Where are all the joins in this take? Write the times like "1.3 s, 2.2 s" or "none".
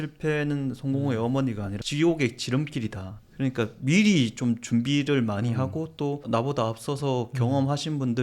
1.9 s